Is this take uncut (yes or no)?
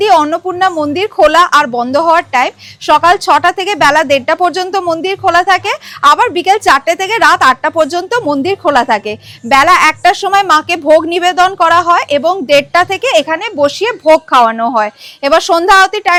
yes